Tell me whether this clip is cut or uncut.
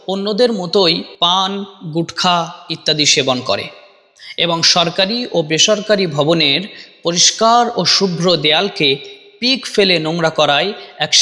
cut